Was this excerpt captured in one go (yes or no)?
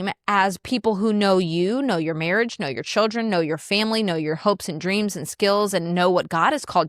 yes